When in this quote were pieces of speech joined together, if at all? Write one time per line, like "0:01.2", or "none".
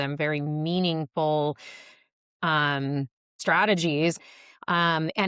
0:03.3
0:04.2